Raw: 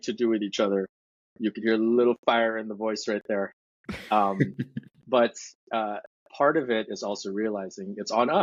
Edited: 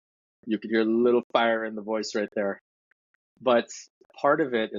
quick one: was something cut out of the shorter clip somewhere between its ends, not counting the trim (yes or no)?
yes